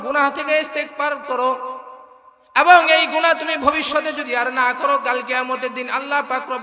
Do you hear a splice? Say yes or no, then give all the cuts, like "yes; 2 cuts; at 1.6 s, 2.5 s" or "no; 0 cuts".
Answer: no; 0 cuts